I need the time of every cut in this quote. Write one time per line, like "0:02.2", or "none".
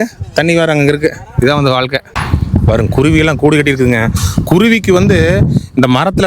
0:02.1

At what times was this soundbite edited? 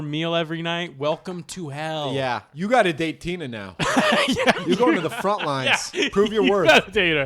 0:02.5

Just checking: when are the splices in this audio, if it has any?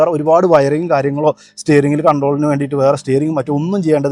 none

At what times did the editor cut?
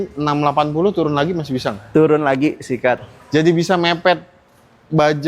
0:03.1

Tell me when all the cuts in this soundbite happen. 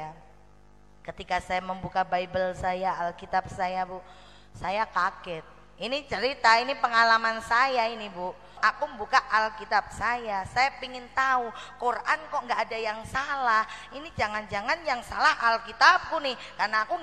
0:08.4

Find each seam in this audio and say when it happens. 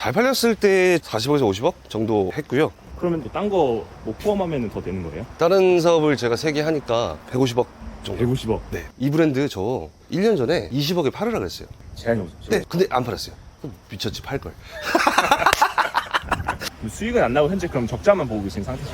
0:01.1
0:02.9
0:05.2
0:08.8
0:16.7

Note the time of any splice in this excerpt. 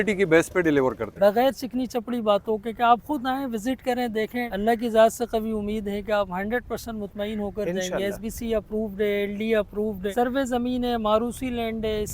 0:01.0
0:04.5
0:10.1

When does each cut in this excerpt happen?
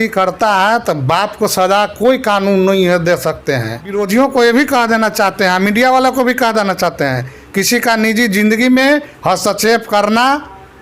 0:04.0

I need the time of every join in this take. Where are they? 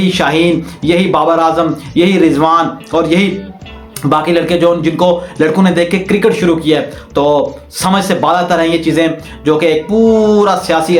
none

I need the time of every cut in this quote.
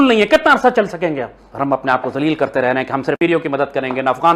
0:03.2

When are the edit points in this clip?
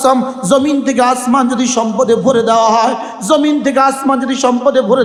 none

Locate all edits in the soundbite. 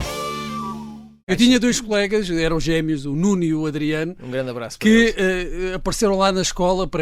0:01.2

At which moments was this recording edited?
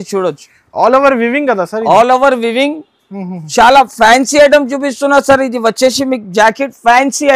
none

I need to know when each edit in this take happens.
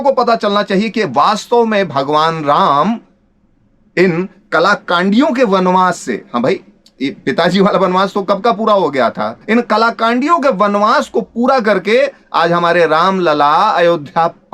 0:09.3

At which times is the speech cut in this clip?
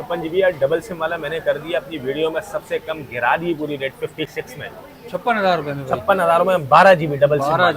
none

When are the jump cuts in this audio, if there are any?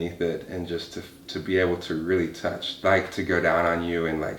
0:02.7

